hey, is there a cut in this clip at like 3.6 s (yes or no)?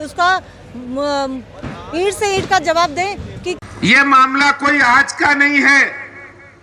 yes